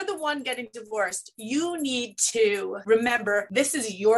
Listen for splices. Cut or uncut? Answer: cut